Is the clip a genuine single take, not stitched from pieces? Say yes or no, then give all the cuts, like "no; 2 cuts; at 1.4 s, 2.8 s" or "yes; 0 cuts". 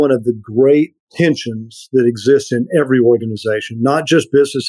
no; 1 cut; at 1.0 s